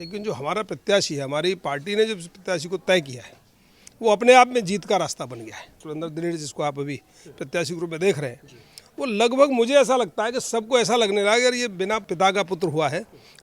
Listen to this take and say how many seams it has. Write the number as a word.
two